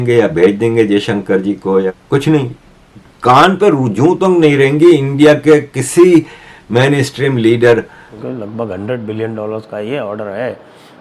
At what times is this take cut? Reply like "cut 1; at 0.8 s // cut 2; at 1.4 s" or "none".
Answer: cut 1; at 1.9 s // cut 2; at 8.0 s